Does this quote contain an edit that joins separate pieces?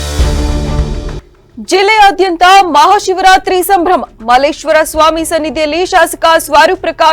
yes; 1 cut; at 1.2 s

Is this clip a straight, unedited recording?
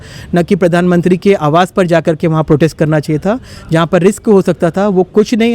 yes; 0 cuts

